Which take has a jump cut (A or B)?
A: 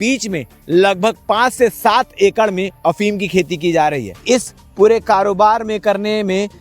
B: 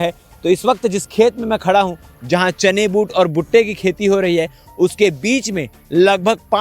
A